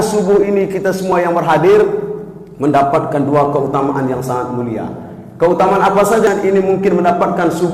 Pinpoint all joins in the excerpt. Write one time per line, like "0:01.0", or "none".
0:06.2